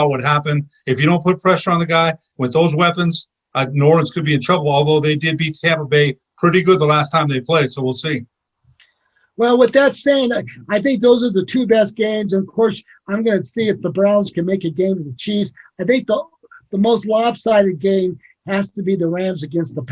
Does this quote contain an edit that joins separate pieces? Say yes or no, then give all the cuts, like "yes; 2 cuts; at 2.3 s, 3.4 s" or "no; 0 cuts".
no; 0 cuts